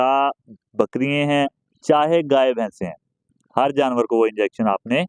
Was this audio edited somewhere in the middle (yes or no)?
no